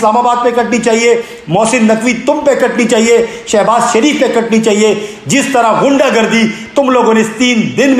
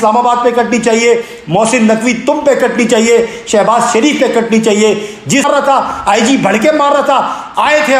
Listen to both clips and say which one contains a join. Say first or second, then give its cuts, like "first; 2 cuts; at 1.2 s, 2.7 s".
second; 1 cut; at 5.4 s